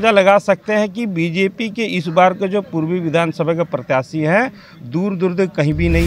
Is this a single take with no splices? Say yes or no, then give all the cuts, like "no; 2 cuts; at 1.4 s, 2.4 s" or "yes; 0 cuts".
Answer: yes; 0 cuts